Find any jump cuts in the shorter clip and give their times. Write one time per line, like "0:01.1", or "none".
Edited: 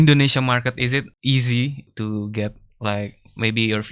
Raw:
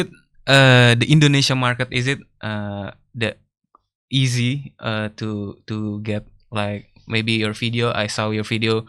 0:01.1
0:01.9